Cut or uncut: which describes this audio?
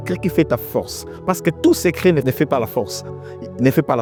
uncut